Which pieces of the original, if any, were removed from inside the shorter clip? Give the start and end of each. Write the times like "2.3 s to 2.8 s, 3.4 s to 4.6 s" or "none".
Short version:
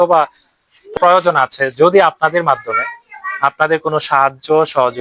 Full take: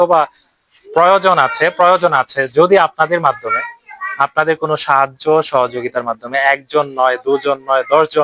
0.9 s to 1.7 s